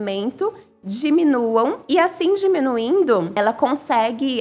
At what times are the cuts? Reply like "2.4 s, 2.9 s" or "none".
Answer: 1.8 s, 3.3 s